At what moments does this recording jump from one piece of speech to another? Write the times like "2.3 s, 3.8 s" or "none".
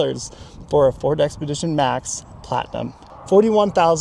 3.0 s